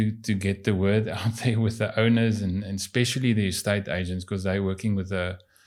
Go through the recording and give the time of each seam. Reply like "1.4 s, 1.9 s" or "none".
none